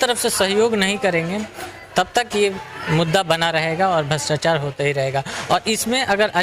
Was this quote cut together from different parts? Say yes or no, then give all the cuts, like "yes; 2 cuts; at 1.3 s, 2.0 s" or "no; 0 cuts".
no; 0 cuts